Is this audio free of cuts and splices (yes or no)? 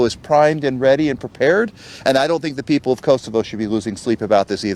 yes